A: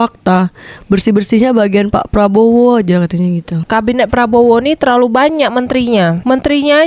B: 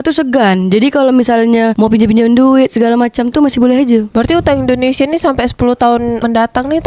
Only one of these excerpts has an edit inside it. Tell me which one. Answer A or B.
A